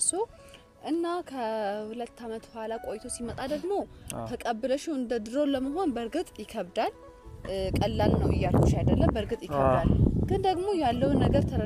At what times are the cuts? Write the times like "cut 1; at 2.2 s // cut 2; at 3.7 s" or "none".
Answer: none

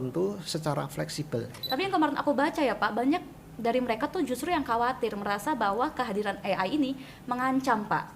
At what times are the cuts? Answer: cut 1; at 1.6 s

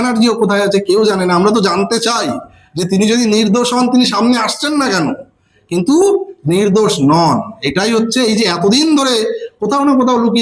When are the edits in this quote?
none

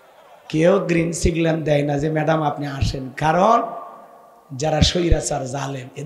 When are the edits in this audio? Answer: none

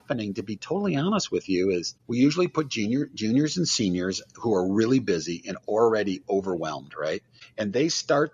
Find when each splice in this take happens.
cut 1; at 2.0 s // cut 2; at 7.4 s

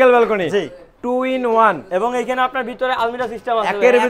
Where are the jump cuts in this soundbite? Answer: none

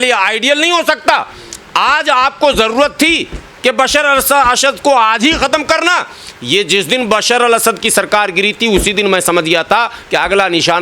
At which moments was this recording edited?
none

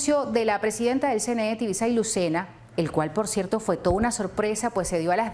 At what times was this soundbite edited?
cut 1; at 3.3 s

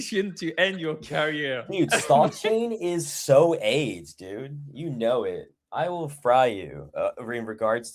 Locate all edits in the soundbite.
none

